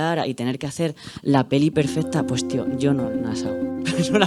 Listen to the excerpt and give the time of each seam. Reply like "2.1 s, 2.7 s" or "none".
none